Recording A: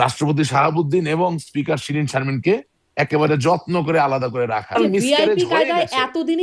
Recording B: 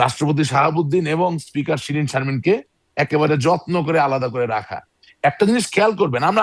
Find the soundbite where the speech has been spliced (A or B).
A